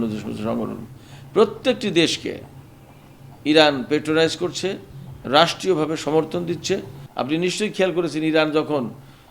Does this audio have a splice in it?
yes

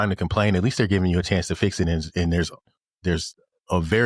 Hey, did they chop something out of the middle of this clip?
no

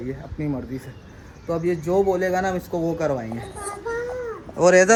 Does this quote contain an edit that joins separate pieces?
no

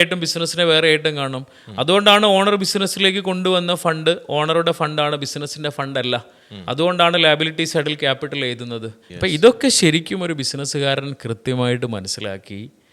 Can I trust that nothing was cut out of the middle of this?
no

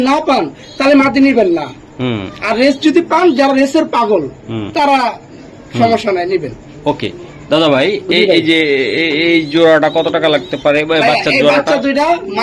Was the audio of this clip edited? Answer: no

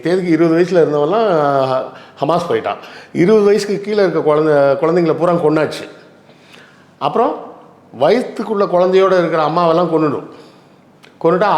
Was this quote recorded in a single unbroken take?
yes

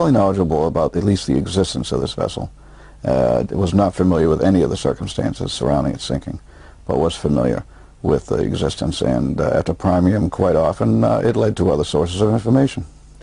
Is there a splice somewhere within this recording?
yes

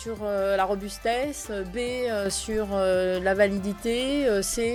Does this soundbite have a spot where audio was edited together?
no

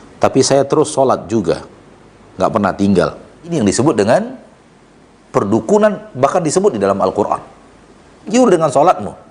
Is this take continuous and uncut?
no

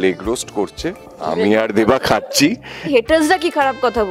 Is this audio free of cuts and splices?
no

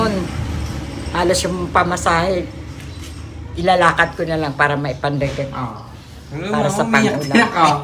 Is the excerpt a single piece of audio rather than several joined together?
yes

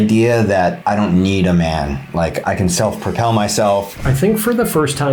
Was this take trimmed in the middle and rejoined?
yes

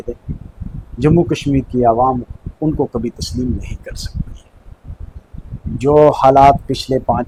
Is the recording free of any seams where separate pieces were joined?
yes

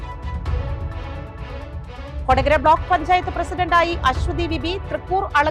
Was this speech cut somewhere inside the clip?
yes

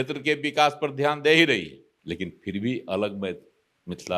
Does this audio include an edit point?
no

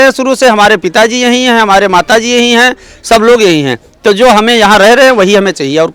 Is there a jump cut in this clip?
no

